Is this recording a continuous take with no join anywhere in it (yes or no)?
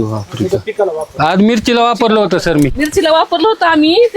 no